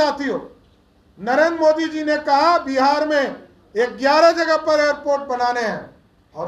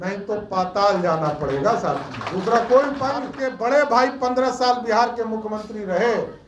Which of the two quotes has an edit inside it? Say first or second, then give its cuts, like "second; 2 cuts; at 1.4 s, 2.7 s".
second; 1 cut; at 3.3 s